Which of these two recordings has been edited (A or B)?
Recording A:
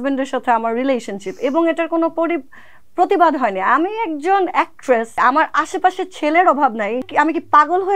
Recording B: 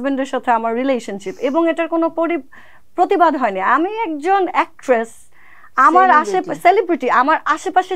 A